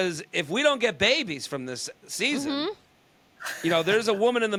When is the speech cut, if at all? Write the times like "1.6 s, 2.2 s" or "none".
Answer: none